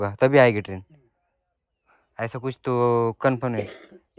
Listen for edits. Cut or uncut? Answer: uncut